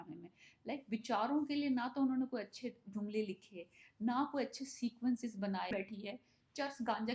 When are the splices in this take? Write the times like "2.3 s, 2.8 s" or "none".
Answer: 5.7 s